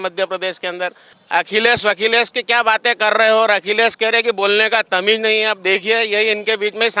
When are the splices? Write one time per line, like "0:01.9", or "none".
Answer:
0:01.1